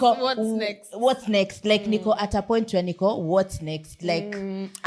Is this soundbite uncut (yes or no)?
yes